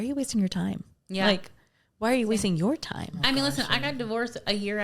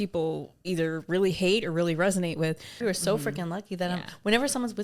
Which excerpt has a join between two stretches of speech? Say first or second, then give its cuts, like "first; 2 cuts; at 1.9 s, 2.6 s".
second; 1 cut; at 2.7 s